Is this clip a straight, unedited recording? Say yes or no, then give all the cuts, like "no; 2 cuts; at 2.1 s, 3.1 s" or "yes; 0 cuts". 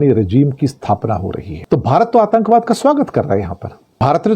no; 1 cut; at 1.5 s